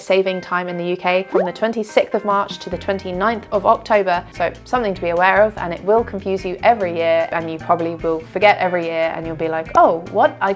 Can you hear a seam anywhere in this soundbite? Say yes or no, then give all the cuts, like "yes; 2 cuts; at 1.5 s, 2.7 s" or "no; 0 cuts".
yes; 3 cuts; at 1.3 s, 4.2 s, 7.3 s